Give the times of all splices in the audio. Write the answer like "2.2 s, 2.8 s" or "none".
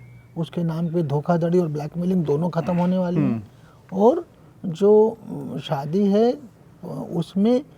none